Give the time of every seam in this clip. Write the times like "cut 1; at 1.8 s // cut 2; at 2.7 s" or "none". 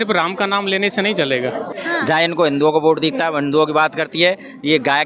cut 1; at 1.8 s